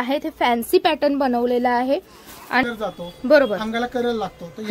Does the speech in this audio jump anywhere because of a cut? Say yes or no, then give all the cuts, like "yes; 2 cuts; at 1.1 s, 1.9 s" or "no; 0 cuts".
yes; 1 cut; at 2.6 s